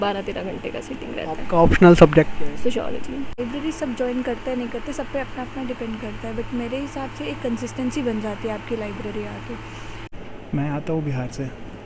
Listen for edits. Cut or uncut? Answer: cut